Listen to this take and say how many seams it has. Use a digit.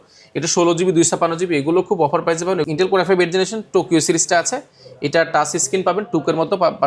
1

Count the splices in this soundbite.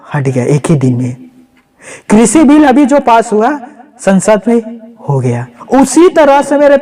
1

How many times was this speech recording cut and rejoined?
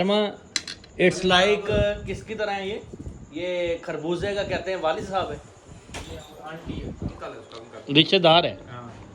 0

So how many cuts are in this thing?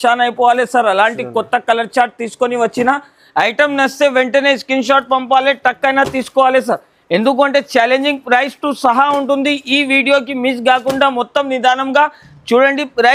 0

